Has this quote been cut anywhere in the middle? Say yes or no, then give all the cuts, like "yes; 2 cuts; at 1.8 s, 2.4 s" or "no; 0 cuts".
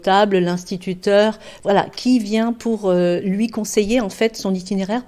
yes; 1 cut; at 1.5 s